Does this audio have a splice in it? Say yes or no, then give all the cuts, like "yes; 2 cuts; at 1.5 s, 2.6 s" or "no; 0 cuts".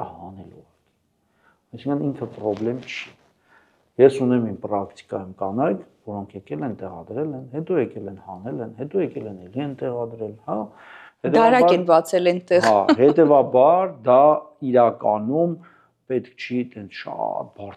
no; 0 cuts